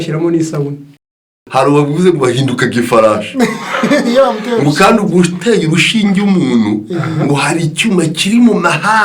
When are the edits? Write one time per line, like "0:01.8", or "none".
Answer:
0:01.4

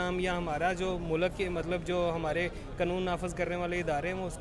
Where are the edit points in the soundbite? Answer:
none

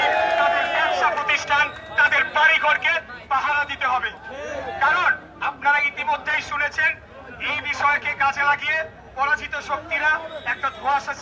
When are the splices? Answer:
none

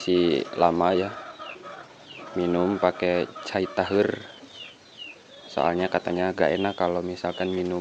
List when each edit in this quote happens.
none

